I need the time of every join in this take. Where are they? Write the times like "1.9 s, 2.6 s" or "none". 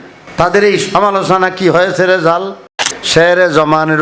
2.8 s